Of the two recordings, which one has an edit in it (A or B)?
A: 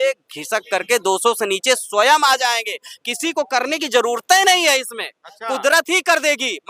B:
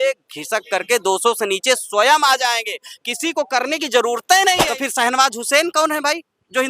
B